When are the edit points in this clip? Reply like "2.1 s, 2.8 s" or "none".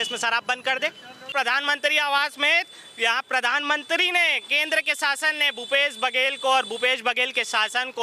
1.3 s